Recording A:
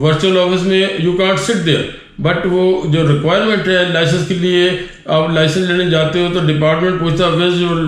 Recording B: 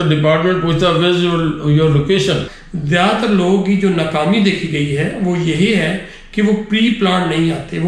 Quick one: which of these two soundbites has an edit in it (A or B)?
B